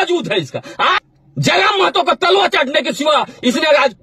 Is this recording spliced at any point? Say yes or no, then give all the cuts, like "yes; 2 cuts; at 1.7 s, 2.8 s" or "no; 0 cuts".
yes; 1 cut; at 1.0 s